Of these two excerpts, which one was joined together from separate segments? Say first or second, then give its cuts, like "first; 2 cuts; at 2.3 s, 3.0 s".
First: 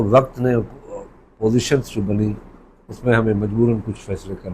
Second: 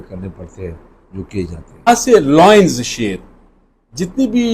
second; 1 cut; at 1.9 s